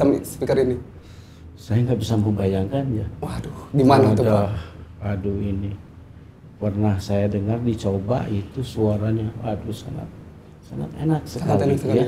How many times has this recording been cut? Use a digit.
0